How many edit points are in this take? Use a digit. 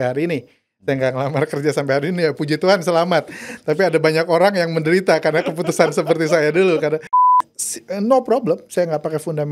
1